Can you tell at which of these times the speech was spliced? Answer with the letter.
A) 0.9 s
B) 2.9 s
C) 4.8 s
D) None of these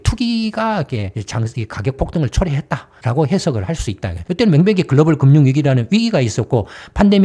D